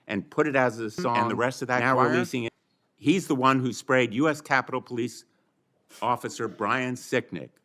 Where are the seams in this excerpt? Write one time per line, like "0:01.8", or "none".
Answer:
0:02.5